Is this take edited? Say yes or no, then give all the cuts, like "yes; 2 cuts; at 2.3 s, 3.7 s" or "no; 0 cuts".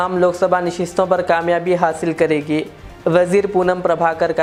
no; 0 cuts